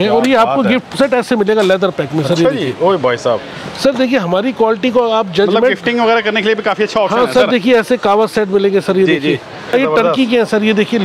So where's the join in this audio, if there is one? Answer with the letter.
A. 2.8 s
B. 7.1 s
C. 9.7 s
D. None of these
C